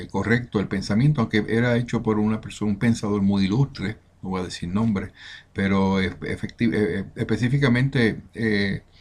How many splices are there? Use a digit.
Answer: 1